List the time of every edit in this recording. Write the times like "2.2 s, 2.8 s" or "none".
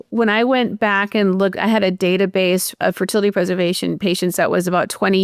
none